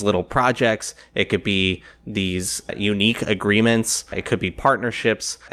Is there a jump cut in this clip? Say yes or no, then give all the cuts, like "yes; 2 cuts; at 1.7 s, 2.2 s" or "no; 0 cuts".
no; 0 cuts